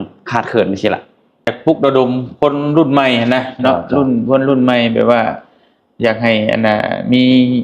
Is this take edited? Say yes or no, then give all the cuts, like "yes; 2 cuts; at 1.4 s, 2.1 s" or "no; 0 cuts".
yes; 1 cut; at 1.5 s